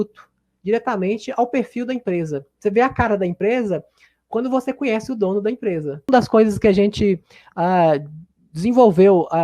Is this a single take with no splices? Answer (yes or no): no